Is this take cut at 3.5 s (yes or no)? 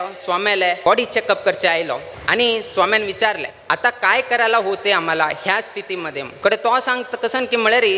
yes